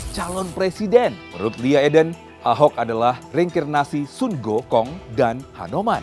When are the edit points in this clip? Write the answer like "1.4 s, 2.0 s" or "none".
1.3 s, 2.3 s, 3.2 s, 5.0 s